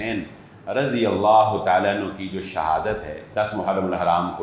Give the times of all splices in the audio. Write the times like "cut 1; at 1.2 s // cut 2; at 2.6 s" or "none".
cut 1; at 3.2 s